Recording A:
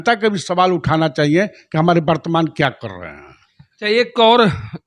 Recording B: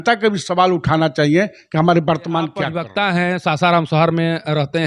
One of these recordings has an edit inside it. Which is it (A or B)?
B